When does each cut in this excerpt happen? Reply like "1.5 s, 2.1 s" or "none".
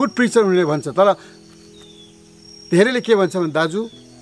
none